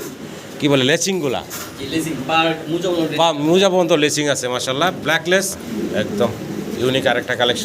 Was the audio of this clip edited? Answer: yes; 1 cut; at 5.6 s

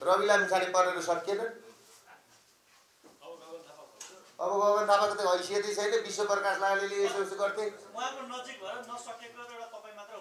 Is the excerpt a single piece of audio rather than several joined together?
yes; 0 cuts

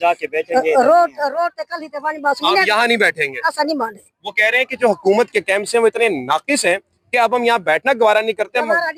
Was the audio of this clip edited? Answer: no; 0 cuts

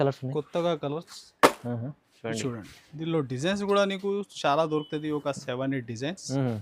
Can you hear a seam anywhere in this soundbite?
yes; 1 cut; at 2.0 s

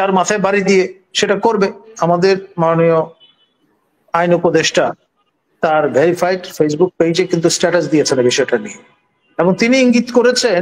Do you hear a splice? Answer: yes; 1 cut; at 1.9 s

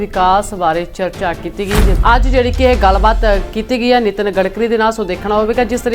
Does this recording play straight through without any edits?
no; 1 cut; at 1.9 s

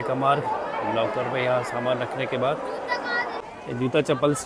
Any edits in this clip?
yes; 1 cut; at 3.4 s

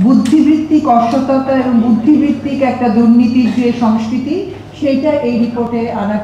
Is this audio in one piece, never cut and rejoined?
yes; 0 cuts

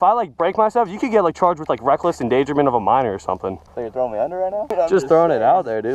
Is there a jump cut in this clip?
yes; 2 cuts; at 3.7 s, 4.7 s

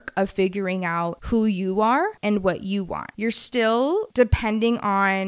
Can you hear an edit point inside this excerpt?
yes; 4 cuts; at 1.2 s, 2.2 s, 3.1 s, 4.1 s

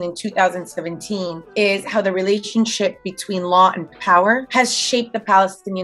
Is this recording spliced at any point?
no; 0 cuts

